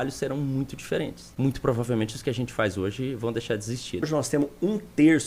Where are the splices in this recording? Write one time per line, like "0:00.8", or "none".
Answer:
0:01.2
0:04.1